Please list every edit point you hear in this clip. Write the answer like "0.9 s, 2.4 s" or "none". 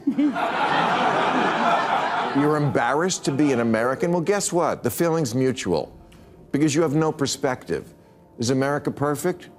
none